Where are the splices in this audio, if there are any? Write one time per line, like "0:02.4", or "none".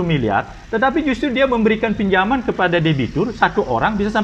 none